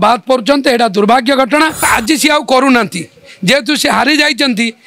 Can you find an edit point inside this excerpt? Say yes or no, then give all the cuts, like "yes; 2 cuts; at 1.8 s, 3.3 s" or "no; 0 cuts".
yes; 1 cut; at 1.9 s